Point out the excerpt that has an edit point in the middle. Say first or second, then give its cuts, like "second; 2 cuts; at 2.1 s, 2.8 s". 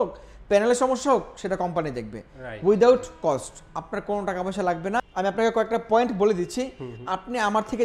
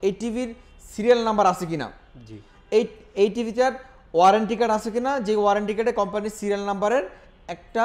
first; 1 cut; at 5.0 s